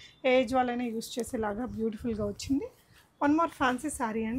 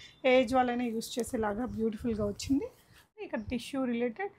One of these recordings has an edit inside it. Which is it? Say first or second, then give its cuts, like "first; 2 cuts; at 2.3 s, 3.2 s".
second; 1 cut; at 3.1 s